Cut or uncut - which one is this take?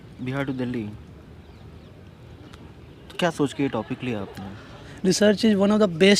cut